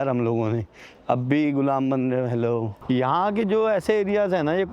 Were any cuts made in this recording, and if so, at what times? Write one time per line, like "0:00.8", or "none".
0:02.7